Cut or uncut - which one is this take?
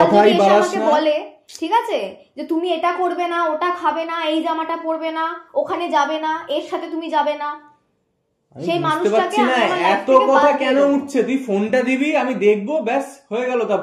uncut